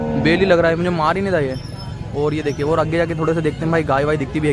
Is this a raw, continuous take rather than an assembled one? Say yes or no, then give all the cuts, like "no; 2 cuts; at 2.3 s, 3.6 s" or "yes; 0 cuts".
yes; 0 cuts